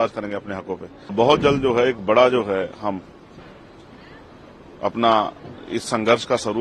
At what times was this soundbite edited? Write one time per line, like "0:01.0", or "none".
0:01.1